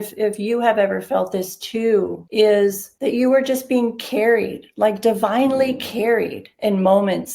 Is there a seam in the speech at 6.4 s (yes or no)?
yes